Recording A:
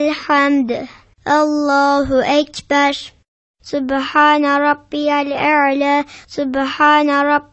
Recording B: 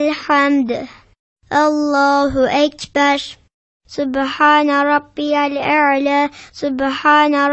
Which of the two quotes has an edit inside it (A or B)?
B